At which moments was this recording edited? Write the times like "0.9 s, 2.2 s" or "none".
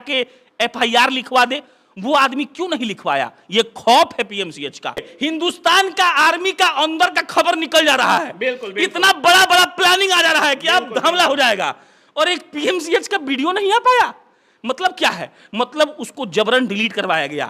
5.1 s